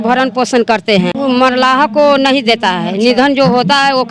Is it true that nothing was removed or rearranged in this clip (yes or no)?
no